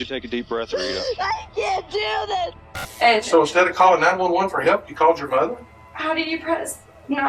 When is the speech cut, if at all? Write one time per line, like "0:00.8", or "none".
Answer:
0:02.6